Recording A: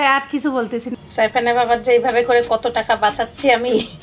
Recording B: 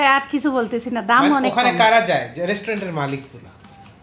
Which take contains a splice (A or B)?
A